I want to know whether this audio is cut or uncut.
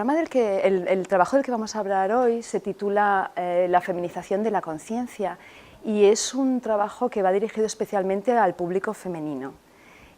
cut